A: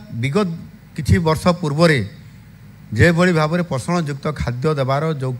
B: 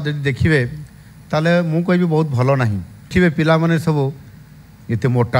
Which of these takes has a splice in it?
B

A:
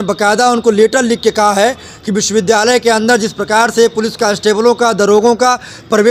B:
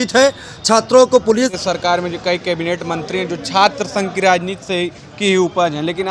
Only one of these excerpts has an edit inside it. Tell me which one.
B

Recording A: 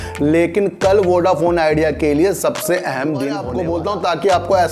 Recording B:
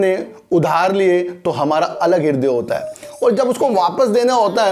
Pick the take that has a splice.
A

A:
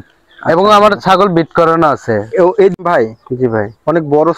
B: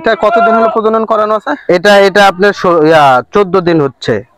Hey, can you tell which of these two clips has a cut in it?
A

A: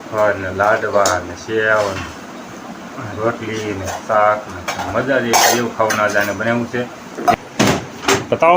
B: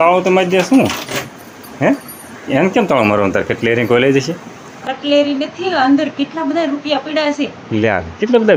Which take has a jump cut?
A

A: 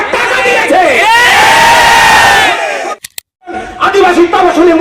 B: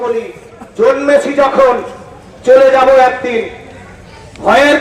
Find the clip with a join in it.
A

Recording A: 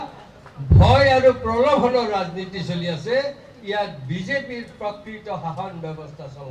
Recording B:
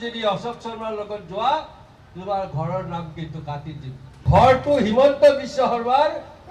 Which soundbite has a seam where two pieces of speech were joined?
B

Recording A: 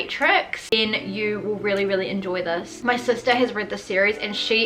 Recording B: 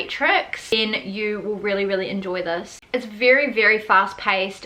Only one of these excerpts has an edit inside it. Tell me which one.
A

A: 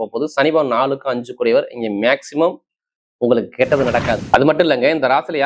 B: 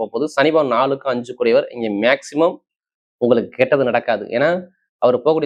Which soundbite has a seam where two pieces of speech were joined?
A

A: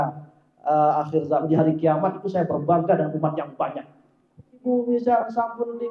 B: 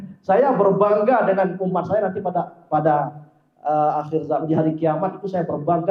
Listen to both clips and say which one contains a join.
A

